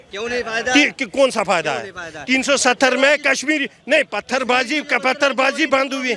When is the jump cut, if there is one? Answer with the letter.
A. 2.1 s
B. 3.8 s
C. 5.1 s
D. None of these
D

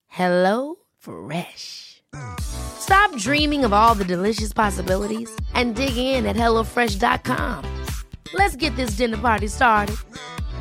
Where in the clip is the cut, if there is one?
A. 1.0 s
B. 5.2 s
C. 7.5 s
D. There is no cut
D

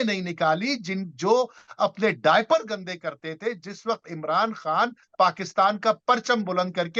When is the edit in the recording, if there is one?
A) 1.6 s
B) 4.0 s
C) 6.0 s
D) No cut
D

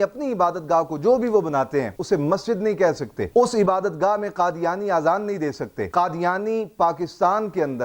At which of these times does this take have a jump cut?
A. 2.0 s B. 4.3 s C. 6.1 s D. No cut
A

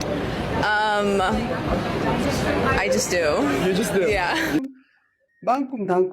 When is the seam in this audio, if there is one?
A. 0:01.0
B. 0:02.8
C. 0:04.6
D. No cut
C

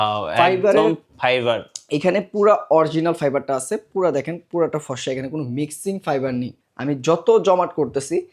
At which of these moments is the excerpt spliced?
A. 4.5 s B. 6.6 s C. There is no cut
B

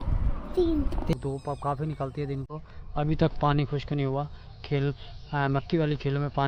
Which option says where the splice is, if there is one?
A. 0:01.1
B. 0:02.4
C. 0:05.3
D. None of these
A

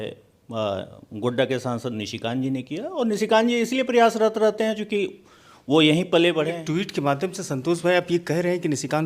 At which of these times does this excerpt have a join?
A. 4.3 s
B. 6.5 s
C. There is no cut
B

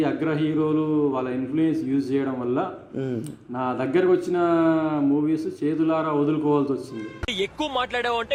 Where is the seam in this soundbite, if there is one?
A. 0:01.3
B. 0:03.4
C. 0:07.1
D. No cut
D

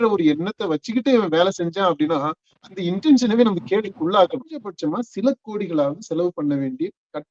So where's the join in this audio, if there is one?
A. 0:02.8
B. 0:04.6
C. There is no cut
B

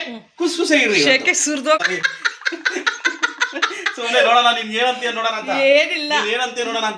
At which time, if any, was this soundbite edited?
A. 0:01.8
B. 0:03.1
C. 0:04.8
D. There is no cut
A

